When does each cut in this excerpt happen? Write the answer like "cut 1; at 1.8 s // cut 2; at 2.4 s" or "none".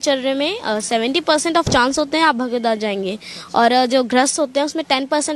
none